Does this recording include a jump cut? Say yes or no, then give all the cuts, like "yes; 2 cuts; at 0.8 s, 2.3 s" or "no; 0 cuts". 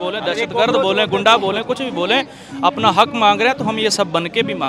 no; 0 cuts